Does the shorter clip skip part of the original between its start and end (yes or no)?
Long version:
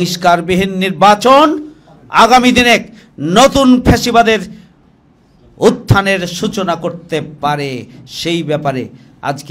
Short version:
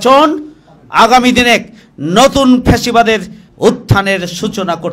yes